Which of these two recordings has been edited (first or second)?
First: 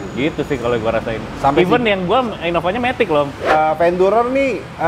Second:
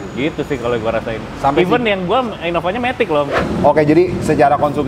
first